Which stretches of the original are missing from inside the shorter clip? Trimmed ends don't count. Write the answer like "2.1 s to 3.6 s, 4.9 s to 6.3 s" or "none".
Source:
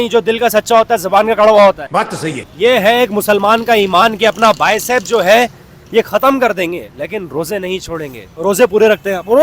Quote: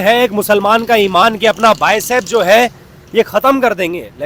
none